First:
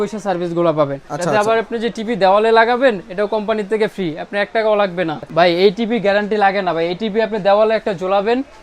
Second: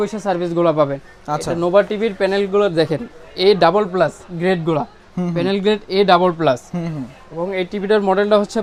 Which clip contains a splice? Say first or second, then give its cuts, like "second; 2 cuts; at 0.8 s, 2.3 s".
first; 2 cuts; at 1.1 s, 5.2 s